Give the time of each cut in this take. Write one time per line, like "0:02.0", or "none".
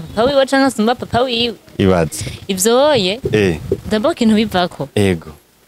none